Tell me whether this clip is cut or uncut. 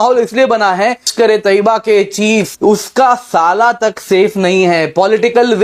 cut